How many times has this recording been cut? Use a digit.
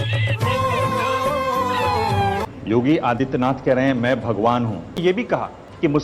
2